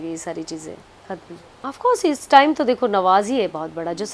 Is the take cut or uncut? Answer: cut